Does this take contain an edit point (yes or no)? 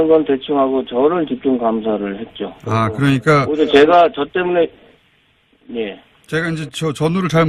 no